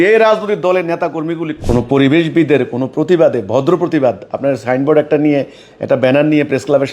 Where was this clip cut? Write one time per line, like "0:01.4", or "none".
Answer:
0:01.5